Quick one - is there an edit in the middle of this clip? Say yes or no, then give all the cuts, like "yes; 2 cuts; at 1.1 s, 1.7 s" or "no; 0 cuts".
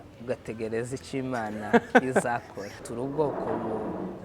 yes; 1 cut; at 2.8 s